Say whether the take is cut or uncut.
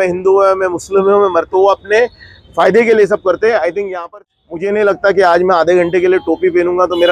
cut